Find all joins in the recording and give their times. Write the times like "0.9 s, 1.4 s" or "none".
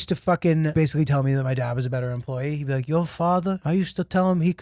0.7 s, 3.6 s